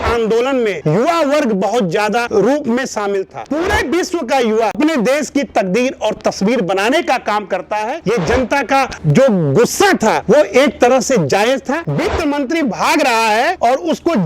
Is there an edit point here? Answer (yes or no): yes